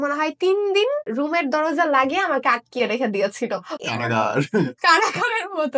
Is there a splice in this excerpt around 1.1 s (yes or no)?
yes